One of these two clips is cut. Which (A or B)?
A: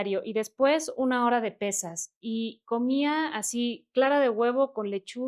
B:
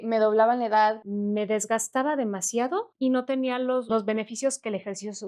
B